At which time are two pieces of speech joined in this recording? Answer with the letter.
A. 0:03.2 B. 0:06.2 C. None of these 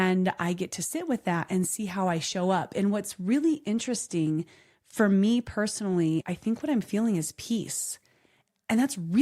B